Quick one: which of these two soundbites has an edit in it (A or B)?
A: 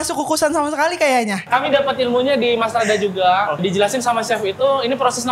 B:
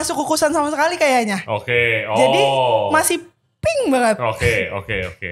A